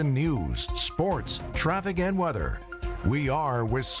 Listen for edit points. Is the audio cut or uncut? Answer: uncut